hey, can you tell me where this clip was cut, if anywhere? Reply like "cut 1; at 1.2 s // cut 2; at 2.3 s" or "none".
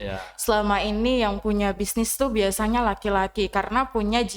none